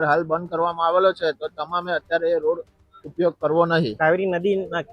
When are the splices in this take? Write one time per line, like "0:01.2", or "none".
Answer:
0:04.0